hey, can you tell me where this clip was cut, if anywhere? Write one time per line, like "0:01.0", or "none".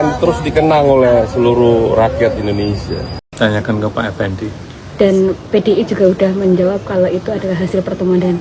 0:03.2